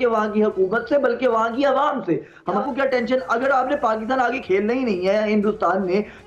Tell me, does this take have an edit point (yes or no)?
yes